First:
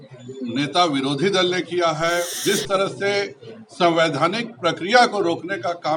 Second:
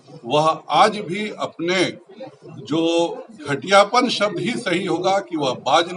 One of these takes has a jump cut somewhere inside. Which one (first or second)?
first